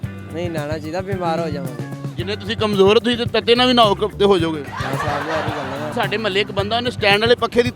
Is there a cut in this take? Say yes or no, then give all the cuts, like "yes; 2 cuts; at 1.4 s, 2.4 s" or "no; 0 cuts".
yes; 1 cut; at 5.9 s